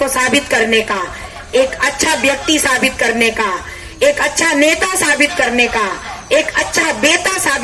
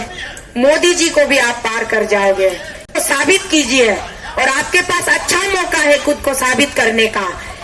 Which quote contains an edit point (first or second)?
second